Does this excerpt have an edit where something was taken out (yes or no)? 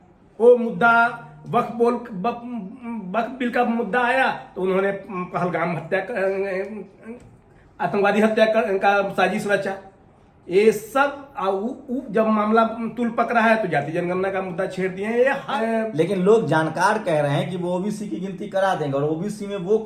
yes